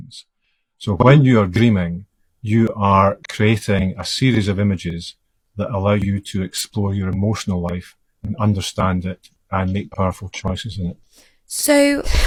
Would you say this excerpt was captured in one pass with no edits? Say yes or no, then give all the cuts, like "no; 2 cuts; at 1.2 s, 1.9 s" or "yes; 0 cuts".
yes; 0 cuts